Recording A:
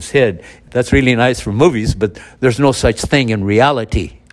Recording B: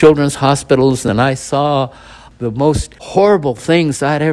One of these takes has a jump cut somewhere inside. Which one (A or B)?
B